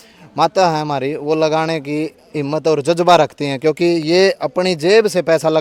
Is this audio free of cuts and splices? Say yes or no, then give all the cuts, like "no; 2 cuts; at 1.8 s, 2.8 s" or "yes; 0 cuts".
yes; 0 cuts